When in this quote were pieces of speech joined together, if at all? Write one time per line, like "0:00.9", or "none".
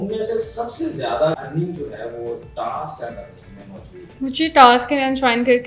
0:01.4
0:04.0